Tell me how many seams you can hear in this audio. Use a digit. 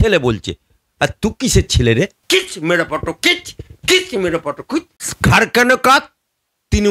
2